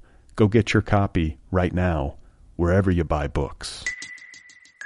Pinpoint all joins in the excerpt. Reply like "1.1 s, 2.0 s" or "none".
none